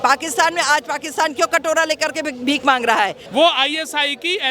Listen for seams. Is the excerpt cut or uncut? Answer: cut